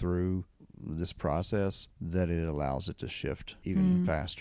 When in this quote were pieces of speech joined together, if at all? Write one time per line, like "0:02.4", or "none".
0:01.9
0:03.5

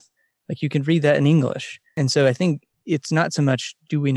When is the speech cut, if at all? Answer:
0:01.8

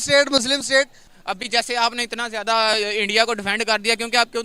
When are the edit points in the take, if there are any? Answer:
0:01.0

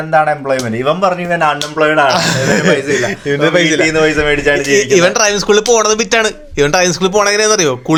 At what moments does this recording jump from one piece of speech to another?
none

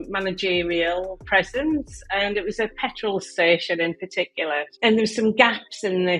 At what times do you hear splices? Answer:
none

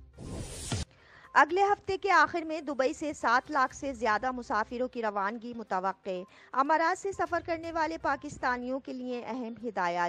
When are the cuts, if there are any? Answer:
0:01.0

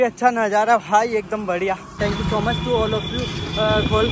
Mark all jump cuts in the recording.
0:02.0

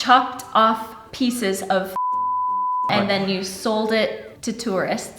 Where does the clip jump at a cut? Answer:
0:04.3

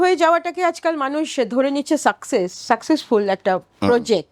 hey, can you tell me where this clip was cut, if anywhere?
none

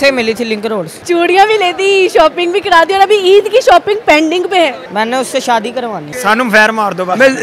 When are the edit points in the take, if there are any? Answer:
0:00.9
0:04.8
0:06.1

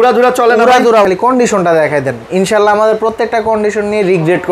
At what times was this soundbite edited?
0:01.0

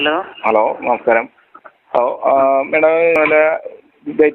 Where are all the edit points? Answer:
0:03.1

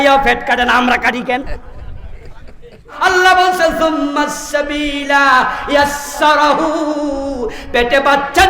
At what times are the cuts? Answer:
0:02.9

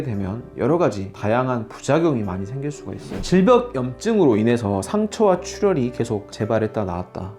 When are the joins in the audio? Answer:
0:03.2

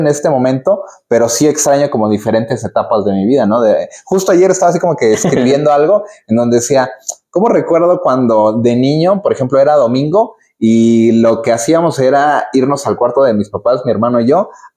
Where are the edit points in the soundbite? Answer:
none

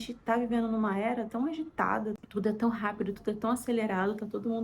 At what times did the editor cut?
0:02.2

